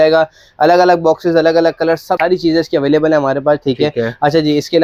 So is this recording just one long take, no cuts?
yes; 0 cuts

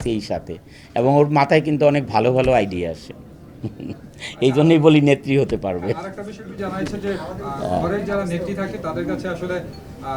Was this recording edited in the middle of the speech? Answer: no; 0 cuts

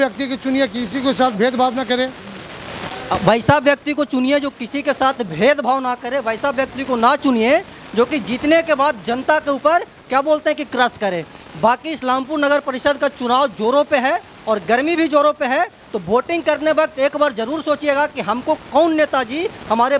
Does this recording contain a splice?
no; 0 cuts

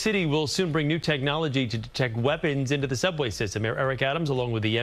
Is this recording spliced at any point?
no; 0 cuts

